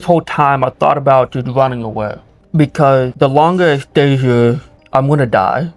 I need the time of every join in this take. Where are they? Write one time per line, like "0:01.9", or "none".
0:03.1